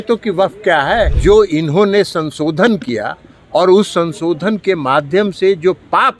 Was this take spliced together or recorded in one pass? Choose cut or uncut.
cut